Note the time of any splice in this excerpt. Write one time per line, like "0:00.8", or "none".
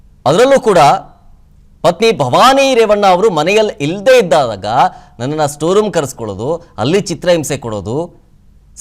none